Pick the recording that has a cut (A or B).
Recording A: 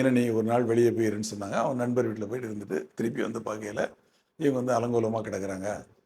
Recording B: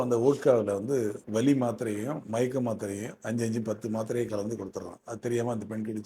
B